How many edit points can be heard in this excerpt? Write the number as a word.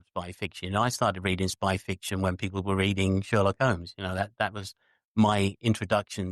zero